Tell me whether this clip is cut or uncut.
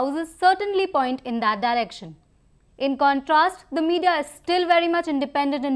uncut